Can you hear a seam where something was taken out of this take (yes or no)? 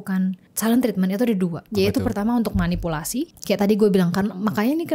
yes